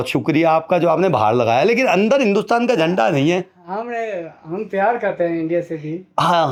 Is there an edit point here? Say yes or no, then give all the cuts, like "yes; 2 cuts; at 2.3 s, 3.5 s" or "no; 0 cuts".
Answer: no; 0 cuts